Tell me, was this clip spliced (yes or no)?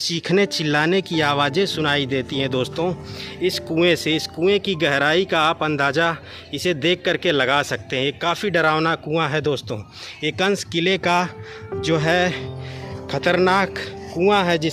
no